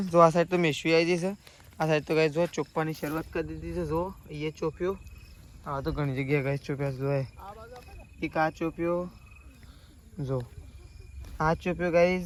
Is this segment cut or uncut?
uncut